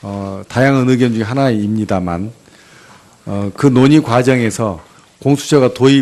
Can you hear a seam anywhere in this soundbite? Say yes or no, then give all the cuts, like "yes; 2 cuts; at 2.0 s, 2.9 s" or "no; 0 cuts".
yes; 1 cut; at 3.4 s